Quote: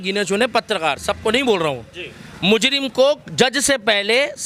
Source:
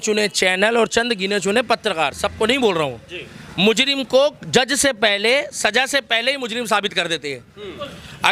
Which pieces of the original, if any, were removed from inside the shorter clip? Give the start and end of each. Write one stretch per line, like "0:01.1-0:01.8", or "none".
none